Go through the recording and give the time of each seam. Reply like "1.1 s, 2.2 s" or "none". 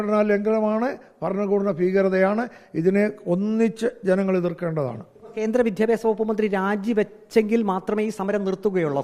none

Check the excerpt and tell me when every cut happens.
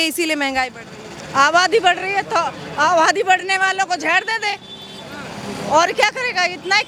none

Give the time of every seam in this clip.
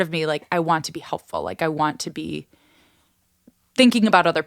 none

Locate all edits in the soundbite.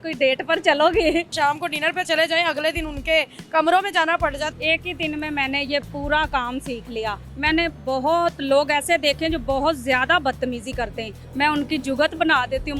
1.3 s, 4.5 s, 7.3 s, 11.2 s

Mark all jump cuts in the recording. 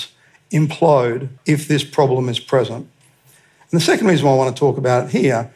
1.3 s

